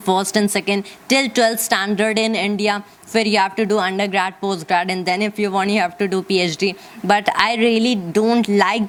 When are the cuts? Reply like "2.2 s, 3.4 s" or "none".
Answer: none